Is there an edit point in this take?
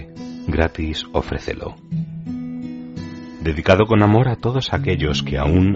no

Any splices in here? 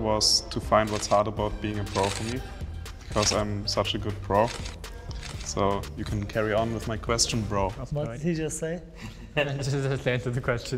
no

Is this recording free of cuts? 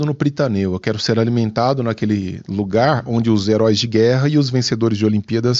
yes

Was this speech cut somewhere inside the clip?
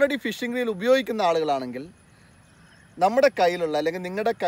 no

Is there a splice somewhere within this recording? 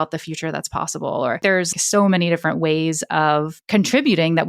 yes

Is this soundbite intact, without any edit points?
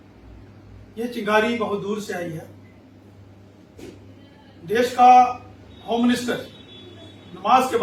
yes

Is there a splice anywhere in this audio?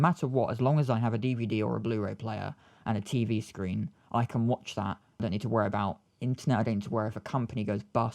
yes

